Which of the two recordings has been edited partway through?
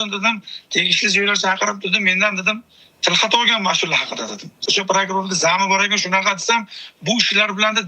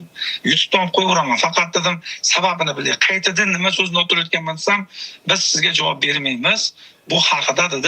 first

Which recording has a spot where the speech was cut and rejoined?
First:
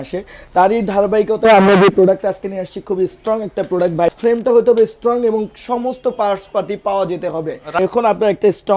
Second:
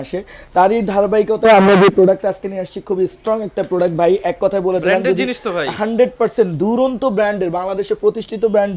first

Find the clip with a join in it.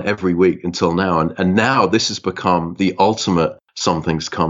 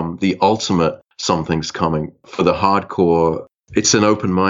second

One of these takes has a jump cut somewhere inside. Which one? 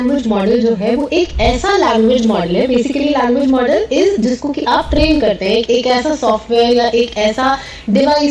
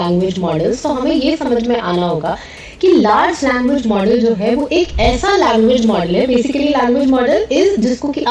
first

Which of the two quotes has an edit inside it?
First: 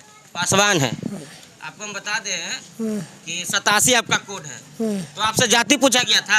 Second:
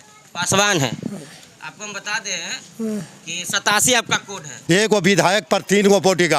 second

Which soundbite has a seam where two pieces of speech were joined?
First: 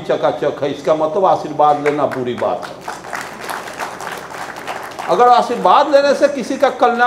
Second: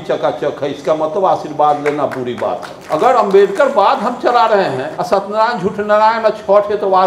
second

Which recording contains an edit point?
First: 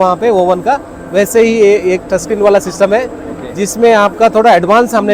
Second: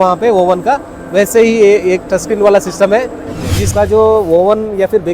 second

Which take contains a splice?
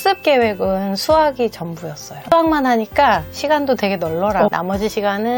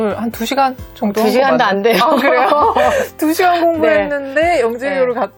first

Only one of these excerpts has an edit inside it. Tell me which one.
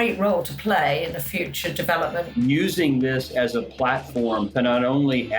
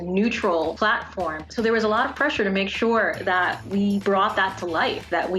first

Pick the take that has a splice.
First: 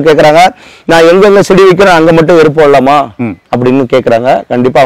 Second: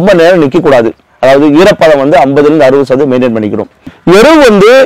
second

